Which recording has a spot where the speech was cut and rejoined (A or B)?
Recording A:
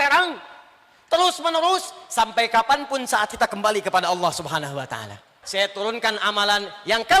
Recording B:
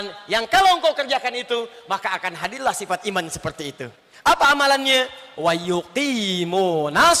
A